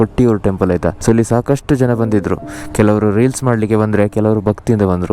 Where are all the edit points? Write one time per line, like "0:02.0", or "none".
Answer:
0:01.0